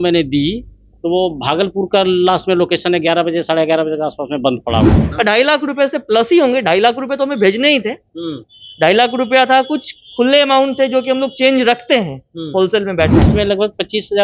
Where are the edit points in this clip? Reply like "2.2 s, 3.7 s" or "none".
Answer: 5.0 s, 13.3 s